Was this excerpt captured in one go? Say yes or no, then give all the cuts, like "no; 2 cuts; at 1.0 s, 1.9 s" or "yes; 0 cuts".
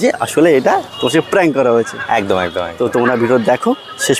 yes; 0 cuts